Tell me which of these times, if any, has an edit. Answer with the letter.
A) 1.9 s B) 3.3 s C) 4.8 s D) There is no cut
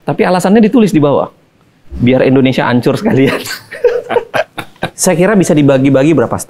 C